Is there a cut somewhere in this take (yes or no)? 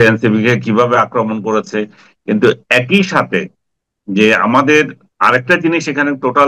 yes